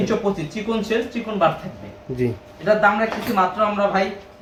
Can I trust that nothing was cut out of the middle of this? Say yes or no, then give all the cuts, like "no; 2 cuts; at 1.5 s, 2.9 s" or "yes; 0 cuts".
yes; 0 cuts